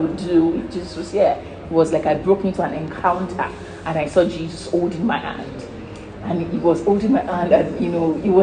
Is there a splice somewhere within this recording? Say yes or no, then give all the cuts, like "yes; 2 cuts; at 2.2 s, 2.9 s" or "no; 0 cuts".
no; 0 cuts